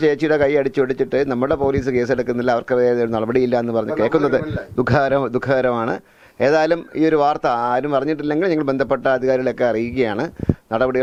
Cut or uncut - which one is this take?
uncut